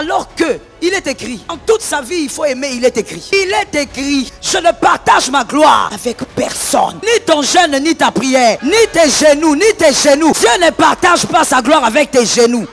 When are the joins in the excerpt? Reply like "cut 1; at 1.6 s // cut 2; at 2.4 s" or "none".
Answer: cut 1; at 1.5 s // cut 2; at 3.3 s // cut 3; at 4.4 s // cut 4; at 5.9 s // cut 5; at 7.0 s // cut 6; at 8.6 s // cut 7; at 10.4 s